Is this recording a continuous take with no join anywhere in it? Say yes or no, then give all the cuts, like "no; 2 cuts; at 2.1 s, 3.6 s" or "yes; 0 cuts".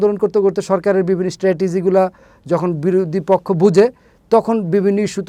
yes; 0 cuts